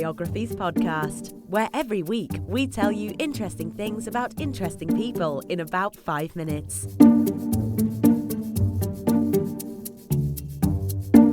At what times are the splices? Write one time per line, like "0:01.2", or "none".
0:04.8